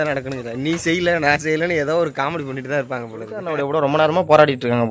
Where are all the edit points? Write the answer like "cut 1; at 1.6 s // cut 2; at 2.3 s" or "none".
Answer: cut 1; at 3.3 s